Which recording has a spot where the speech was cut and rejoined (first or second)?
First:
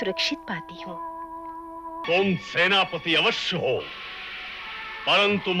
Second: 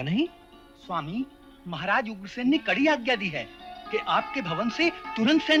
first